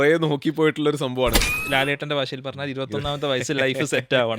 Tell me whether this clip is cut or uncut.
cut